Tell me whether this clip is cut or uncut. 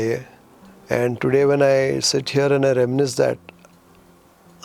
uncut